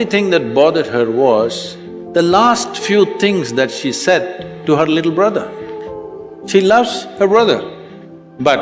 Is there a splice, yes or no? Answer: no